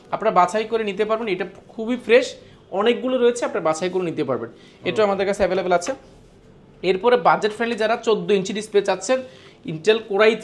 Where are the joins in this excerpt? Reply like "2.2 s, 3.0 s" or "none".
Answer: none